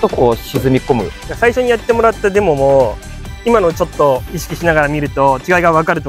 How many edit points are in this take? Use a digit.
1